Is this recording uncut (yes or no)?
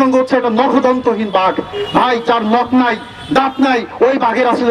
yes